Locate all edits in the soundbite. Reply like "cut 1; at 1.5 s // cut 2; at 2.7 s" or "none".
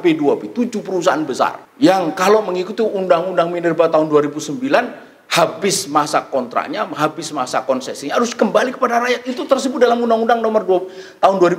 cut 1; at 1.6 s